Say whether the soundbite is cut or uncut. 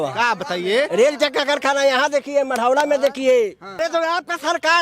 cut